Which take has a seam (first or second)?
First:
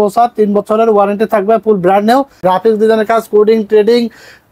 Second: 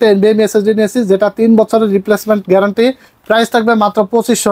first